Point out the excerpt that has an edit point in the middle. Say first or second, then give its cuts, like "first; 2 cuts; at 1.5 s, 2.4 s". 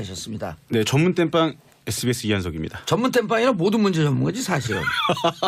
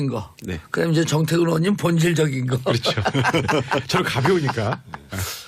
second; 1 cut; at 3.8 s